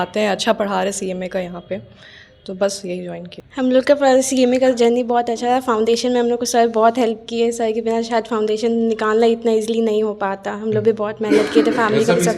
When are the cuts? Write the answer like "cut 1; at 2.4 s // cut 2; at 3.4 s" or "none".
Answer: none